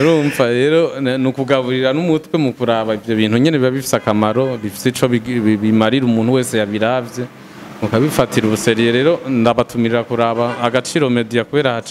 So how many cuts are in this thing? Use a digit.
0